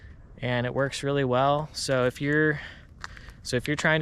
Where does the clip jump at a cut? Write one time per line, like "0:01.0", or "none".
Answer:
none

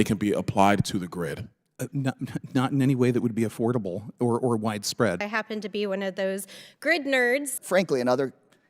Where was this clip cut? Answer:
0:05.2
0:07.5

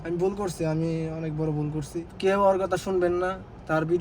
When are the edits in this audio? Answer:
0:02.1

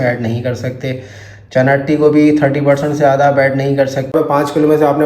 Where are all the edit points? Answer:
0:04.1

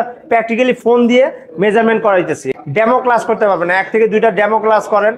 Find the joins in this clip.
0:02.6

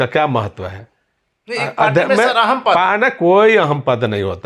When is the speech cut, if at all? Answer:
none

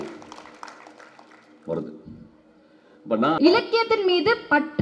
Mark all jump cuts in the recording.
0:03.4

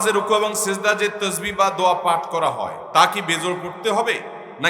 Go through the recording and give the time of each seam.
0:02.8

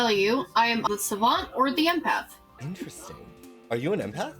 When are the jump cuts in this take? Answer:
0:00.9
0:02.5

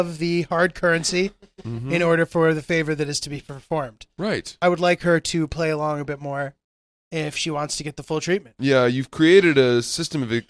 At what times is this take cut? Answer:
0:04.6
0:08.5

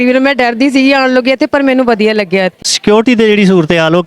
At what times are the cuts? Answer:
0:02.7

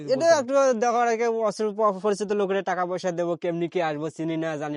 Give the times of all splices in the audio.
none

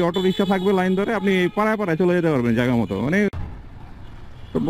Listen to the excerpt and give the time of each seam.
none

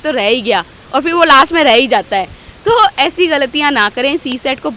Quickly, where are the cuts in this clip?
none

